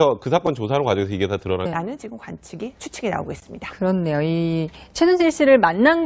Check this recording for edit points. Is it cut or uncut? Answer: uncut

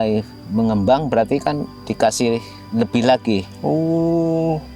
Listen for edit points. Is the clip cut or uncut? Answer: uncut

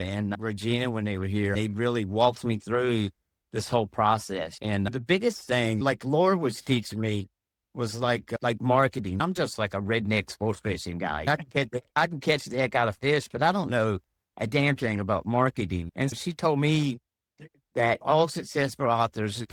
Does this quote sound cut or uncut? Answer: uncut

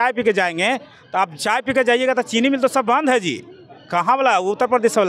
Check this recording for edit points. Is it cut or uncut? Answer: uncut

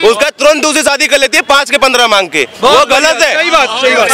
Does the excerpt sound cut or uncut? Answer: uncut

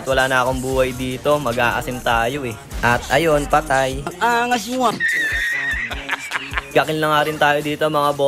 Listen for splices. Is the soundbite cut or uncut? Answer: cut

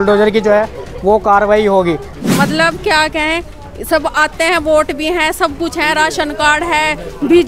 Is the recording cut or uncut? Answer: cut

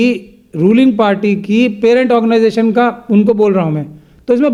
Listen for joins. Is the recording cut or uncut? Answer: uncut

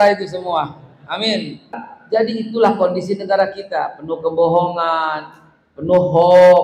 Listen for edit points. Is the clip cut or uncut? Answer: cut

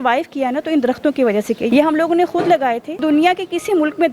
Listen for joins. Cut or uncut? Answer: cut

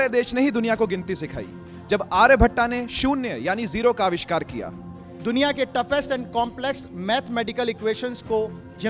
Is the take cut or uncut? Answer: uncut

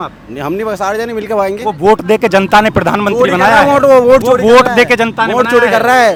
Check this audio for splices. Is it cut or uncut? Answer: uncut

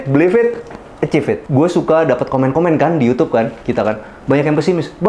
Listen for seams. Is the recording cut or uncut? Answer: cut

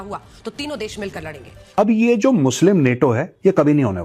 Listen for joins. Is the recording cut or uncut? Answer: cut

